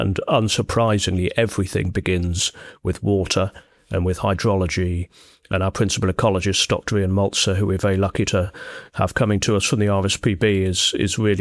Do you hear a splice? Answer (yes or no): no